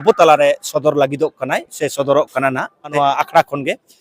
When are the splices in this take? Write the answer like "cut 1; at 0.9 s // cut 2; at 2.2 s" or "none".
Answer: cut 1; at 2.9 s